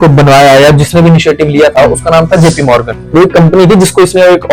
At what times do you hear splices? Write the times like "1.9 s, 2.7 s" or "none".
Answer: 2.9 s